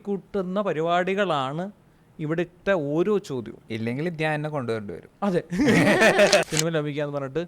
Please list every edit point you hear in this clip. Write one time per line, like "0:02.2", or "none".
0:03.6
0:05.0
0:06.4